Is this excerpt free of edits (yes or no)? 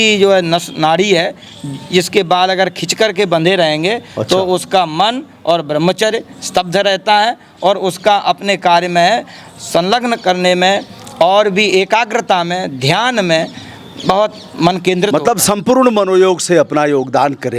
yes